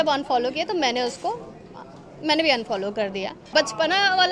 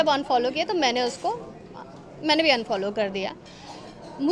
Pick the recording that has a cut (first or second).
first